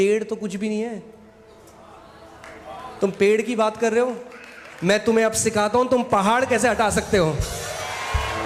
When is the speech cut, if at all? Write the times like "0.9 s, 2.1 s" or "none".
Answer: none